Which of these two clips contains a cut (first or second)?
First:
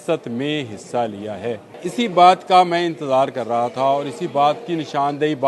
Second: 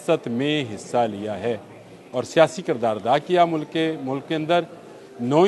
first